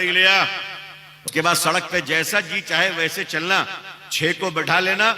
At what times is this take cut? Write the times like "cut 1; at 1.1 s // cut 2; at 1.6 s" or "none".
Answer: cut 1; at 1.3 s